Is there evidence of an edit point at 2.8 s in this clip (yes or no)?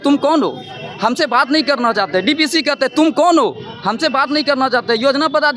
no